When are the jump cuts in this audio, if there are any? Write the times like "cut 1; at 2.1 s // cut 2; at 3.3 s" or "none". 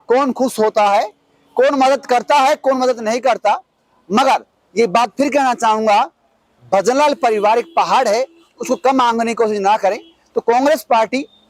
none